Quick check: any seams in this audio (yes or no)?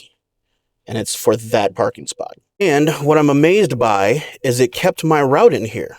yes